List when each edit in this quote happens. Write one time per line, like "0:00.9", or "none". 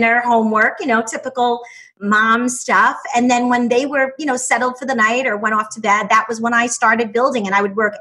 0:02.0